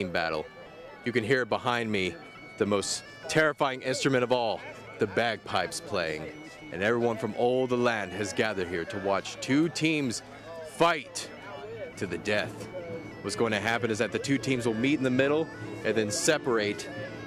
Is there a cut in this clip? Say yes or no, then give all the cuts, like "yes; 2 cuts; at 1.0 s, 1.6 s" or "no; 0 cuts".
no; 0 cuts